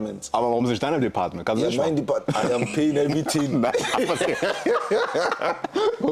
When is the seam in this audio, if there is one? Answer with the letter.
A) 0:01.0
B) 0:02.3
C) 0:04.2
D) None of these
D